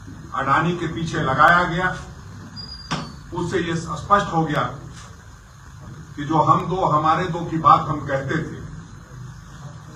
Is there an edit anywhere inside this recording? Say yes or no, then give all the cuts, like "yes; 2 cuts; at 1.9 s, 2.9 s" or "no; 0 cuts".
no; 0 cuts